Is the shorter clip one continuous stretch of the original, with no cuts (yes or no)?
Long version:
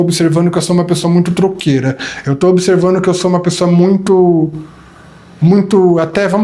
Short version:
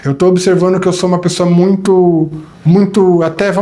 no